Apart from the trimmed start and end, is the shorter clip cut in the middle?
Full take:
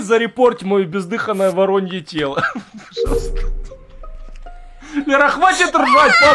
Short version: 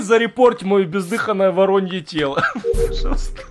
yes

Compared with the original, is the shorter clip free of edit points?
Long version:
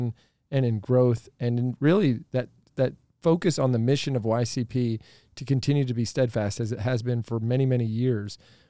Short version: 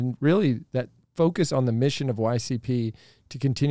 no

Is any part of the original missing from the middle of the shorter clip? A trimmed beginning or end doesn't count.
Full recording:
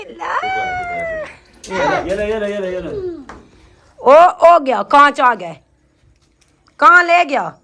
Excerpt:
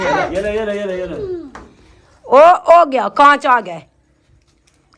no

